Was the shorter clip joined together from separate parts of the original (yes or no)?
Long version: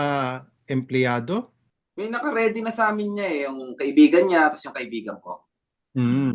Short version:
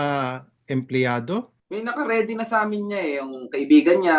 yes